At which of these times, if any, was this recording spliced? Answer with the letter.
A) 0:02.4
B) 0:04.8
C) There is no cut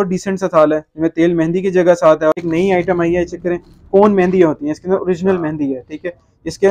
A